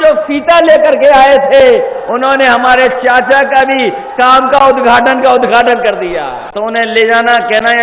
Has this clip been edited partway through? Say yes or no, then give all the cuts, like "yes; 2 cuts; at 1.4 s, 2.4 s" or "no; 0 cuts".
yes; 1 cut; at 6.4 s